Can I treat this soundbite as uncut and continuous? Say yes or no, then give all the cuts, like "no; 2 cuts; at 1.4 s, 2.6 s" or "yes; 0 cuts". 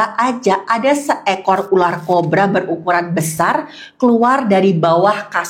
yes; 0 cuts